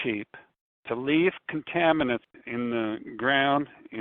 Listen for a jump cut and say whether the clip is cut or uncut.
cut